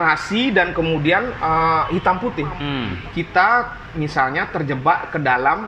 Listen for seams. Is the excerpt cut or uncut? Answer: cut